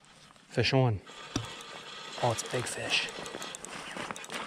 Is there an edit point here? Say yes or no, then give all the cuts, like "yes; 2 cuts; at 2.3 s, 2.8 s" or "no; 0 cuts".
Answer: no; 0 cuts